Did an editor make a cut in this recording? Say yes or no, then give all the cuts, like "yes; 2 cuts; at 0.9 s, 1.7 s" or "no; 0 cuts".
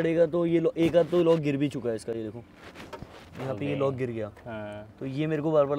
no; 0 cuts